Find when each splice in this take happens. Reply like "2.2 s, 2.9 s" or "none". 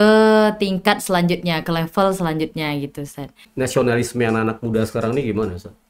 3.4 s

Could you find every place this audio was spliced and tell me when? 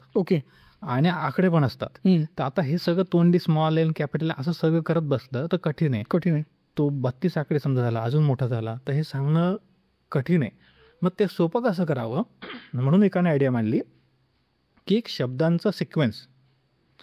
none

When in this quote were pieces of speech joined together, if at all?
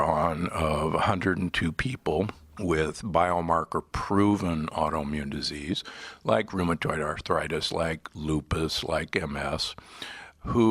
2.4 s, 7.2 s

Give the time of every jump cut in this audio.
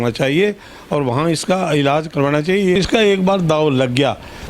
2.7 s

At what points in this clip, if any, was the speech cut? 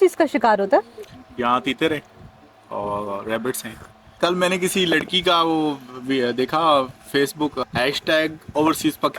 4.1 s, 7.6 s

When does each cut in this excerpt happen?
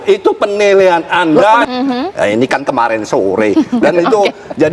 1.6 s

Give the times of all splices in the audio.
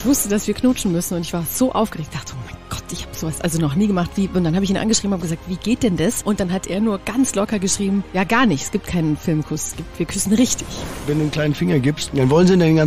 6.7 s, 8.1 s, 11.0 s, 12.0 s

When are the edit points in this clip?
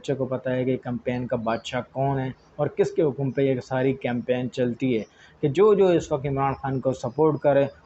none

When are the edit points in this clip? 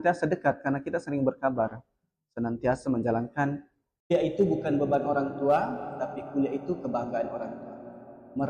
4.1 s

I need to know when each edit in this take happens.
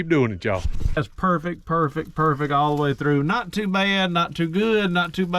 0.9 s

